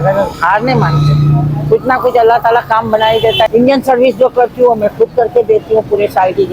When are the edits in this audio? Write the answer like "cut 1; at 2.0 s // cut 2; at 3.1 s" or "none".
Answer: cut 1; at 3.5 s